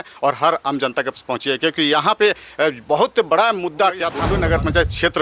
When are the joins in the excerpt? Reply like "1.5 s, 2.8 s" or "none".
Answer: 4.2 s